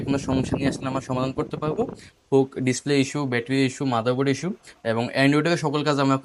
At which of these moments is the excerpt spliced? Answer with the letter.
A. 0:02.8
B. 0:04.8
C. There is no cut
C